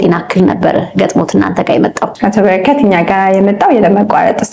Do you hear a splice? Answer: no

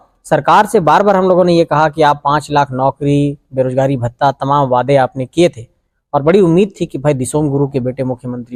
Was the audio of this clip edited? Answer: no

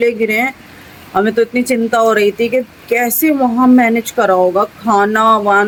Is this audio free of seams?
yes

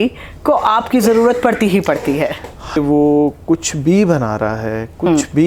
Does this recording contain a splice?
yes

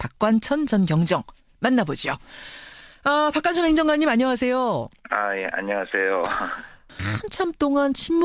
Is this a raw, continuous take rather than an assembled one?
no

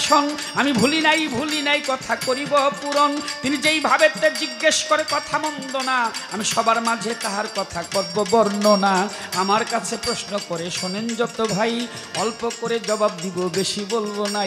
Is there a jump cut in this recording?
no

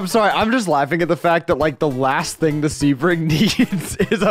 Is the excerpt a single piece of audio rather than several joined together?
yes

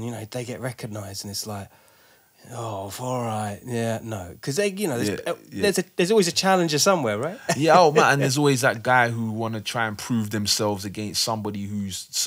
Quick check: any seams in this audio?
no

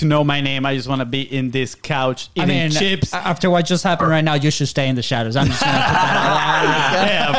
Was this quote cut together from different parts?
no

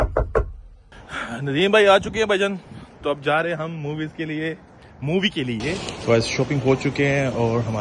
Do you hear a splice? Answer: yes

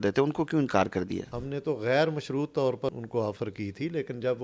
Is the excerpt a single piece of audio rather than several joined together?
no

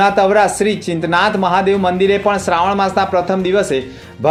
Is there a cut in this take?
no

